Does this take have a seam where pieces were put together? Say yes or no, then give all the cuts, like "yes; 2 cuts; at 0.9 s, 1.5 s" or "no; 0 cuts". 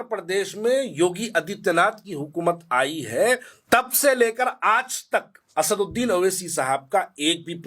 yes; 2 cuts; at 3.5 s, 5.4 s